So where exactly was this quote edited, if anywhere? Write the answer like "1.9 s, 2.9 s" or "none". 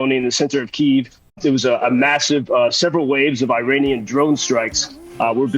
1.3 s